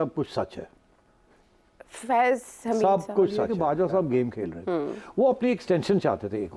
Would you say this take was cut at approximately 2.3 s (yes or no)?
no